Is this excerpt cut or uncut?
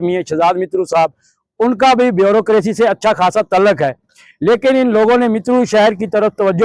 uncut